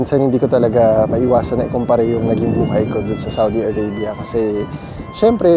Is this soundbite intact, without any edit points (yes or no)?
yes